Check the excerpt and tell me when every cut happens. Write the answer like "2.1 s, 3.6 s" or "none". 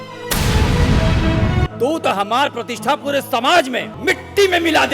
1.6 s, 3.9 s